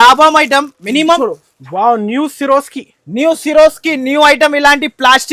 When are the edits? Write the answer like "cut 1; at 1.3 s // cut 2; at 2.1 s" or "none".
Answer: cut 1; at 1.2 s